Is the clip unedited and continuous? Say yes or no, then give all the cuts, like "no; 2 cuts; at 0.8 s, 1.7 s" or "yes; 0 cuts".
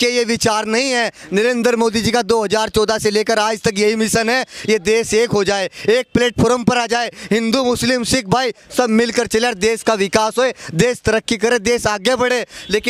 yes; 0 cuts